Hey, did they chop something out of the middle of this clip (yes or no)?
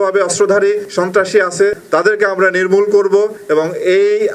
yes